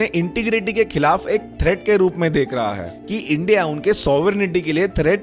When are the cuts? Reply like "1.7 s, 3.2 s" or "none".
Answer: 2.8 s